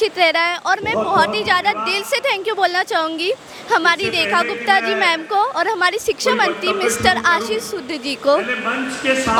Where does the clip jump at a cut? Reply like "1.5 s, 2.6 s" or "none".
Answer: none